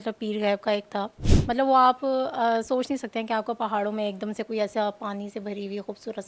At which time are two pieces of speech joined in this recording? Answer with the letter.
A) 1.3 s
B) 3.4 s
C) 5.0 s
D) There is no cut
A